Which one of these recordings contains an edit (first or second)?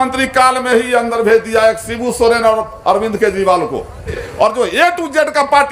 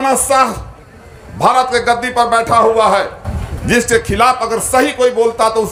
first